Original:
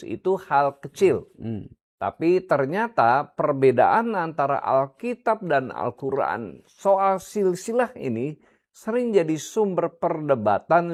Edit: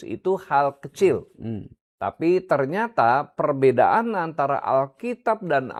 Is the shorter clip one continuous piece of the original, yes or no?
yes